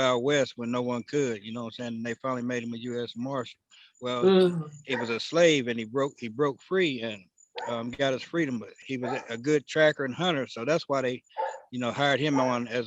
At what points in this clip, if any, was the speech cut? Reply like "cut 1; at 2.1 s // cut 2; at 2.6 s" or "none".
cut 1; at 8.8 s